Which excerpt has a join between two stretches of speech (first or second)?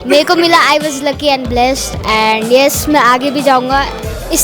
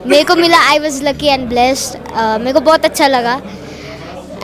first